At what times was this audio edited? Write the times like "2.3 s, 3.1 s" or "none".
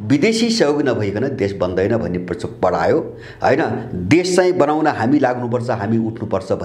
none